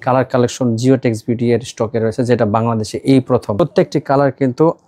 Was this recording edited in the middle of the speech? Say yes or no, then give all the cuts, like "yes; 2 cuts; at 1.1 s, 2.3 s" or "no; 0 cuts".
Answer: yes; 1 cut; at 3.5 s